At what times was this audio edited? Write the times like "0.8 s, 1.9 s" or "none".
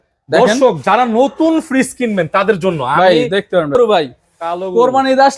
3.7 s